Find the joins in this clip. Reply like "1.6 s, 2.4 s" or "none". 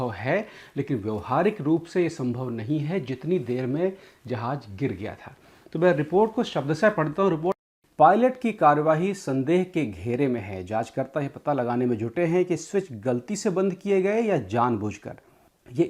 7.7 s

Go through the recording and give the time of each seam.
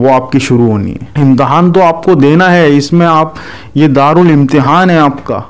1.0 s

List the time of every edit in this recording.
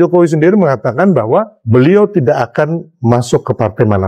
1.6 s, 2.9 s

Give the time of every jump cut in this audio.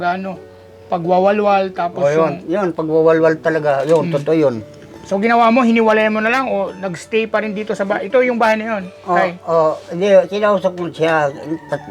none

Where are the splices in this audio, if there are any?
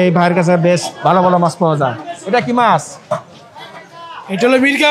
none

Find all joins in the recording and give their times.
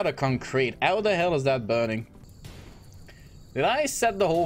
2.2 s

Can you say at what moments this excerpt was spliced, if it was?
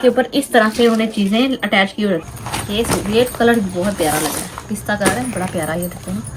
2.3 s

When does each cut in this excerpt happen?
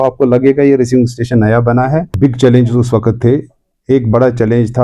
2.1 s

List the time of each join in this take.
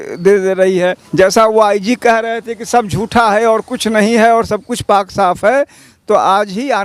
1.0 s

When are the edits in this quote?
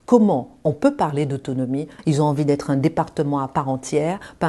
1.9 s

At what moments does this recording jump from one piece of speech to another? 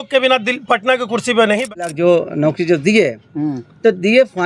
1.9 s

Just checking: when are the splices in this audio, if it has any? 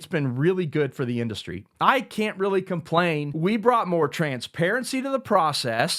3.3 s

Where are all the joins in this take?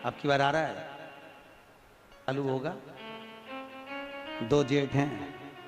2.3 s

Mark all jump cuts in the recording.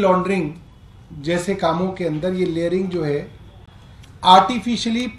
none

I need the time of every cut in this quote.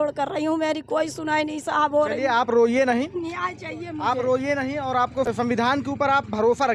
5.3 s

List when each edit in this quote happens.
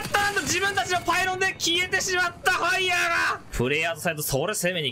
3.4 s

